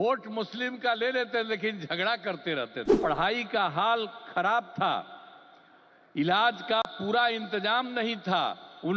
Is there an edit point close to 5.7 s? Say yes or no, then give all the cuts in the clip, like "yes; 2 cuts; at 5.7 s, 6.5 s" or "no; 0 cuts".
no; 1 cut; at 2.9 s